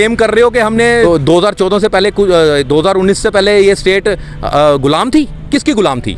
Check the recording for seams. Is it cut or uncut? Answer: cut